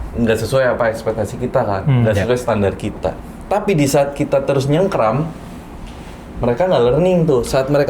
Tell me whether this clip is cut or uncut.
uncut